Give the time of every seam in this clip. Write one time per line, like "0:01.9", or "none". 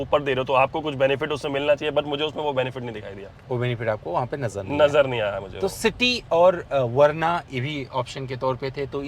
none